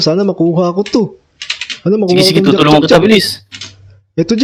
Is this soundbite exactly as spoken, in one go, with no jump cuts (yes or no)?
yes